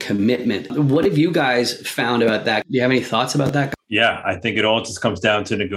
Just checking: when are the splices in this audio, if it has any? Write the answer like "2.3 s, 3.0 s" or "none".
0.7 s, 2.6 s, 3.7 s

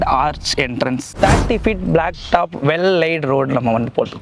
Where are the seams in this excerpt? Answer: 1.2 s

